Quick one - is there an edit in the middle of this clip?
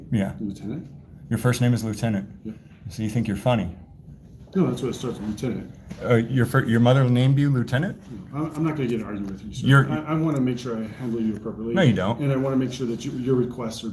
no; 0 cuts

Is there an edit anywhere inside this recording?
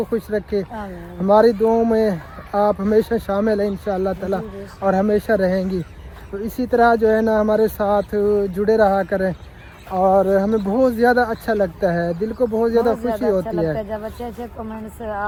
no; 0 cuts

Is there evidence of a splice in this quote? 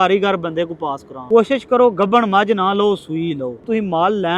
yes; 2 cuts; at 1.1 s, 3.6 s

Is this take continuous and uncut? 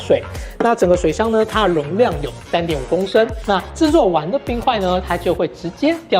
no; 1 cut; at 3.4 s

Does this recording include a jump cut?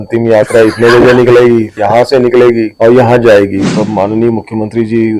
yes; 3 cuts; at 1.7 s, 2.7 s, 3.7 s

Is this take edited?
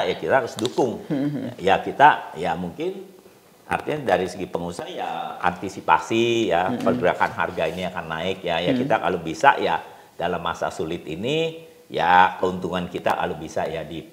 no; 0 cuts

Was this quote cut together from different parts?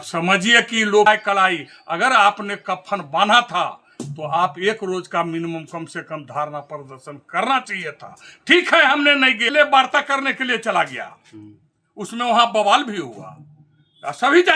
yes; 2 cuts; at 1.1 s, 9.5 s

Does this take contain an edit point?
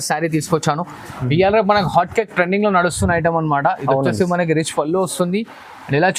no; 0 cuts

